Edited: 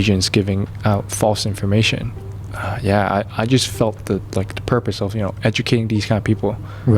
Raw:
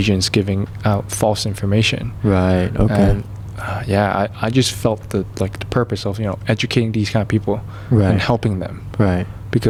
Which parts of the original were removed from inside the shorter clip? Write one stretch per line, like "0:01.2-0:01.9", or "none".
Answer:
0:02.2-0:03.2